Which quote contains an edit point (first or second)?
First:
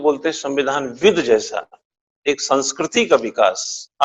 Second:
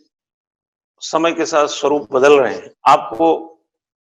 second